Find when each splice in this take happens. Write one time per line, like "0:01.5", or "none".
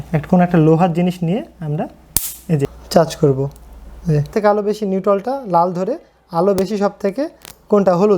0:02.8
0:04.3